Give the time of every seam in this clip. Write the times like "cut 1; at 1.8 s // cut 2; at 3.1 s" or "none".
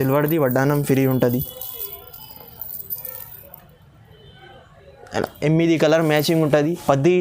none

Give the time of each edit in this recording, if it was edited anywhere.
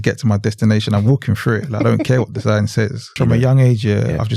cut 1; at 3.2 s

